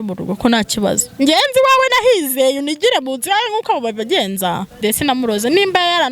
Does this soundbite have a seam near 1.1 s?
no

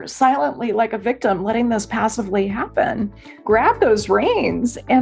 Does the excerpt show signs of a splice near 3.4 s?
yes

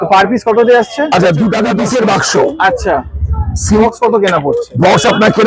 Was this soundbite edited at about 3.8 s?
yes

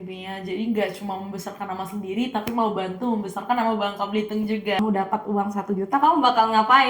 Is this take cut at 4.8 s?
yes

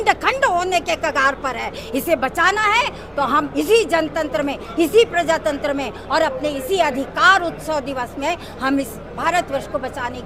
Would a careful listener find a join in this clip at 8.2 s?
no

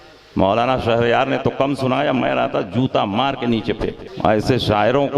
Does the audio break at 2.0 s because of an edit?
no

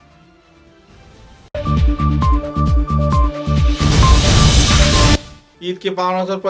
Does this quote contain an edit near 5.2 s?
yes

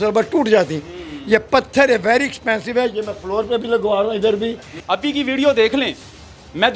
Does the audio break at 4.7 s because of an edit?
yes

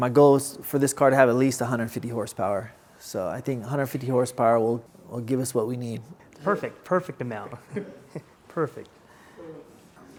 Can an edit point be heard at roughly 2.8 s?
no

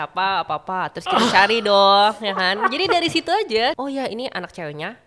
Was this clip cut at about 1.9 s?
no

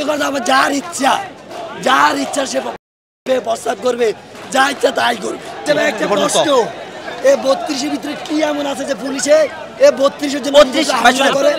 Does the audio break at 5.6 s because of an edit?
yes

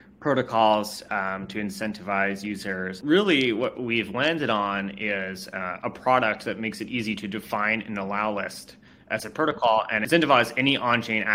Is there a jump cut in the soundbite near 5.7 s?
no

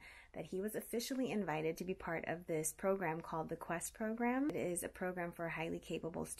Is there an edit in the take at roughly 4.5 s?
yes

